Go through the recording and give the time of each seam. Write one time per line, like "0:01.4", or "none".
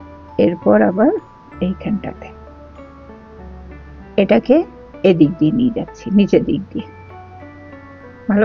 0:02.2
0:04.1